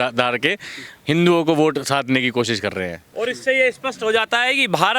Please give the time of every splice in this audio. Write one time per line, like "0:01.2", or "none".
0:03.0